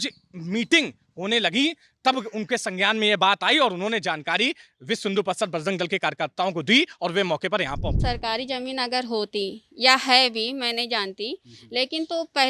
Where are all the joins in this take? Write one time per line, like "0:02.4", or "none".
0:08.0